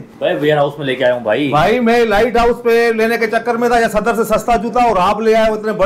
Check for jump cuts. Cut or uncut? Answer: uncut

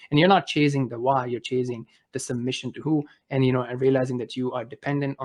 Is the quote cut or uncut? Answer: uncut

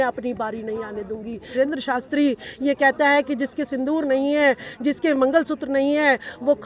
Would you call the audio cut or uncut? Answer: cut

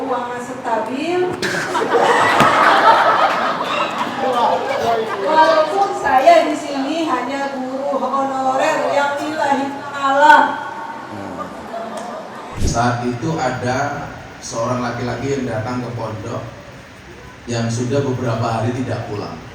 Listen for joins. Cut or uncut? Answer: cut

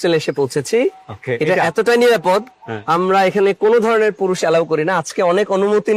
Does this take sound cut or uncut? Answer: uncut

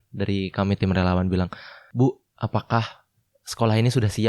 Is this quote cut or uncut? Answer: cut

